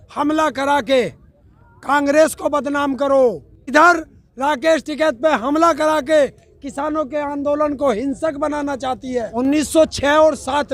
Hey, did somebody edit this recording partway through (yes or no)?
yes